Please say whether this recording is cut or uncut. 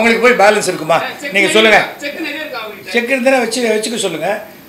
uncut